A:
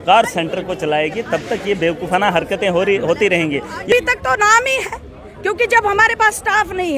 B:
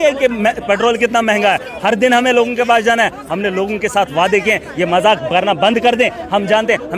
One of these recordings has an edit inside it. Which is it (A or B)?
A